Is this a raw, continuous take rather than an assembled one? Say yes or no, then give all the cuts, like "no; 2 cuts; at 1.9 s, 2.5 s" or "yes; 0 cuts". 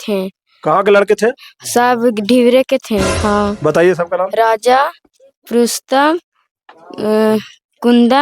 no; 1 cut; at 3.1 s